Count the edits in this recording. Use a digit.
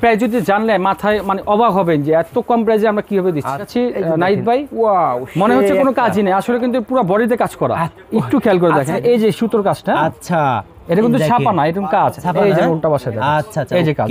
2